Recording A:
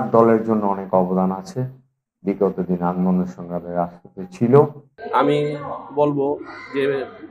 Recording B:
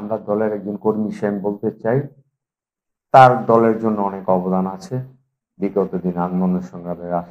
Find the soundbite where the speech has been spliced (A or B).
A